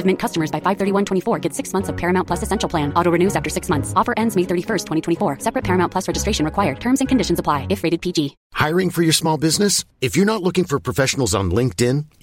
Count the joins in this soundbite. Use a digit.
1